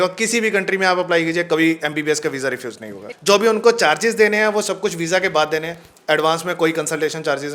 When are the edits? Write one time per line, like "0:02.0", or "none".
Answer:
0:03.1